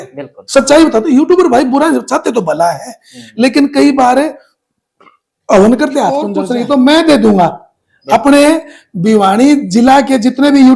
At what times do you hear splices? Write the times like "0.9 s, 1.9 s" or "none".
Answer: 6.3 s